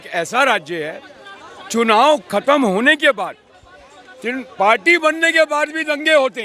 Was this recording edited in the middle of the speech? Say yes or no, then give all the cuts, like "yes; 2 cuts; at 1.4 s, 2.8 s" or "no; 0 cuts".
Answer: no; 0 cuts